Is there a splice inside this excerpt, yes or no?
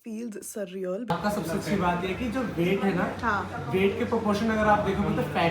yes